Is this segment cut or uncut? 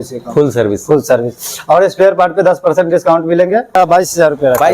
cut